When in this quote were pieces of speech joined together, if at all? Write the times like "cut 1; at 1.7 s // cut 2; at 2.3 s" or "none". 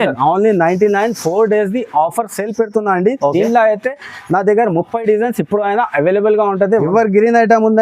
cut 1; at 6.8 s

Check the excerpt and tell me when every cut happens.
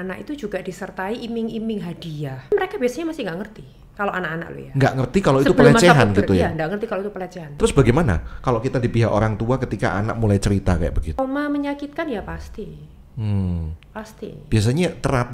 cut 1; at 2.5 s // cut 2; at 7.4 s // cut 3; at 11.2 s

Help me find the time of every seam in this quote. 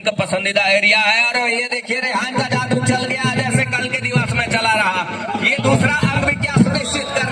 none

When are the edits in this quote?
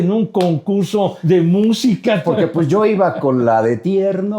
cut 1; at 1.2 s // cut 2; at 2.2 s

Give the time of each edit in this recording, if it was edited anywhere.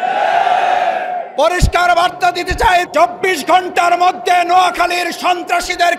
cut 1; at 2.9 s

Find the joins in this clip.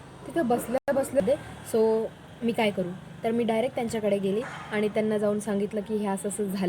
cut 1; at 1.2 s

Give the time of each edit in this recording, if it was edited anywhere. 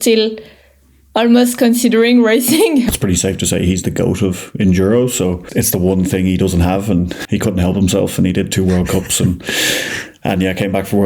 cut 1; at 2.9 s // cut 2; at 5.4 s // cut 3; at 7.2 s

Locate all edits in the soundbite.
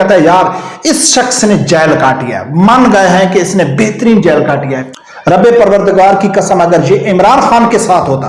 cut 1; at 4.9 s

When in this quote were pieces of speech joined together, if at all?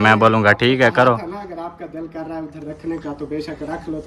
none

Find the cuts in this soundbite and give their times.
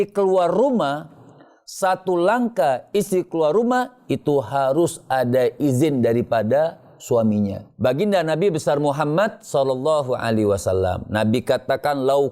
cut 1; at 7.6 s

